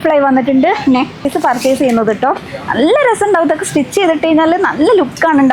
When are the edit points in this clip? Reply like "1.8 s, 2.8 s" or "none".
1.2 s